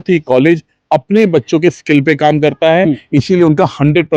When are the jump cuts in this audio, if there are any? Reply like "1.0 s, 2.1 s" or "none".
none